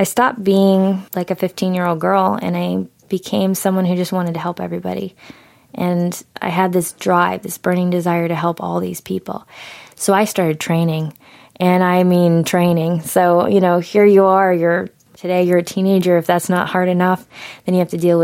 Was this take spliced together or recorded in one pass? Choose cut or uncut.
cut